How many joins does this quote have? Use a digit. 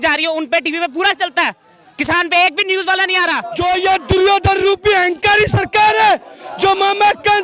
1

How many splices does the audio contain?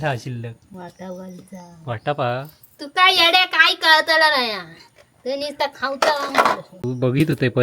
1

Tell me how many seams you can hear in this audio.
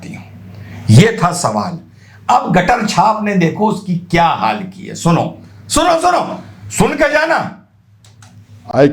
0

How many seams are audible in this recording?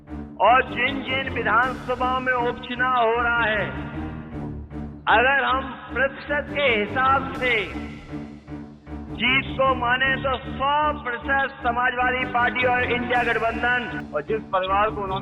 1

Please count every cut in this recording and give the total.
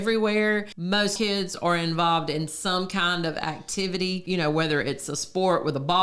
2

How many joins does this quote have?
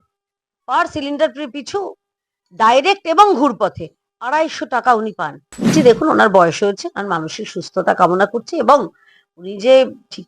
1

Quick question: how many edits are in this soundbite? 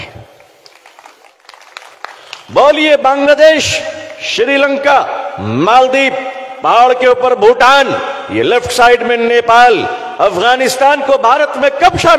1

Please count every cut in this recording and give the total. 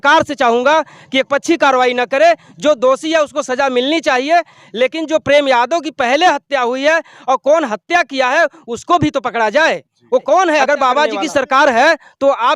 1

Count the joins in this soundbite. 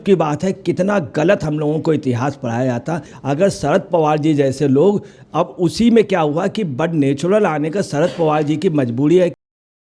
1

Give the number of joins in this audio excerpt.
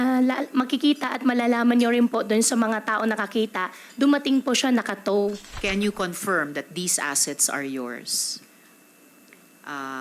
1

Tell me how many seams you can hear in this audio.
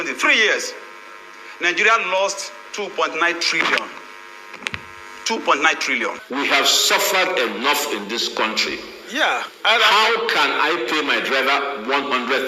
1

